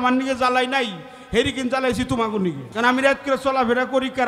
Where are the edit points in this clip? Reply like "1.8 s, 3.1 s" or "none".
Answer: 2.7 s